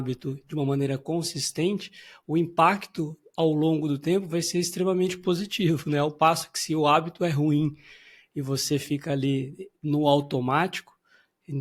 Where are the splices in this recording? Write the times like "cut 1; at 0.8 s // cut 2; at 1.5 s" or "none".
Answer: none

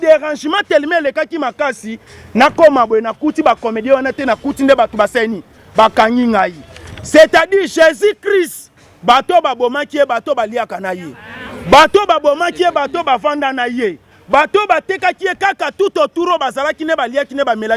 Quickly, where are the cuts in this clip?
none

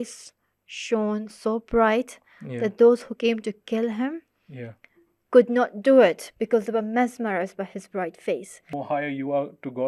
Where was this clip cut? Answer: cut 1; at 8.7 s

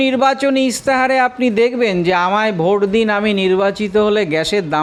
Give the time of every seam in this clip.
none

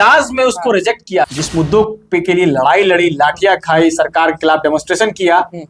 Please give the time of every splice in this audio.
cut 1; at 1.3 s

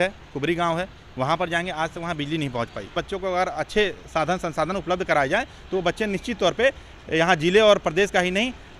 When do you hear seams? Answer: cut 1; at 2.9 s

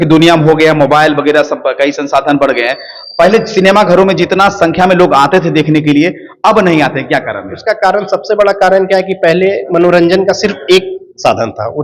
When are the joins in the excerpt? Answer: none

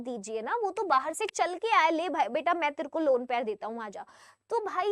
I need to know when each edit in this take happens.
none

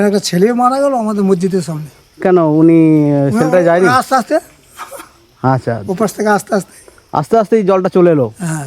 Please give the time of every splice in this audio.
none

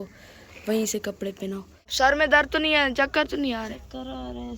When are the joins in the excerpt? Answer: cut 1; at 1.9 s

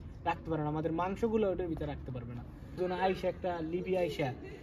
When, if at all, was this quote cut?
cut 1; at 2.7 s

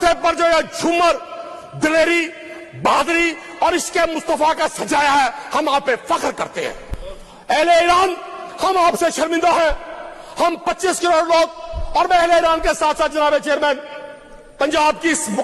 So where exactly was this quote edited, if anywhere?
none

